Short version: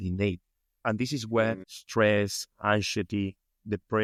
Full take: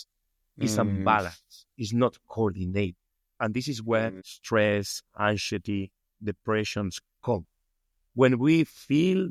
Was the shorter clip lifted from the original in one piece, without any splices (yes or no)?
yes